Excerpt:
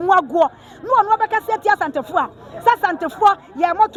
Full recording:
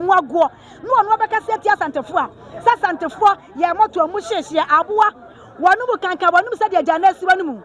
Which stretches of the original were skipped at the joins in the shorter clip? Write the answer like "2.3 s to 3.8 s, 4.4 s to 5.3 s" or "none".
none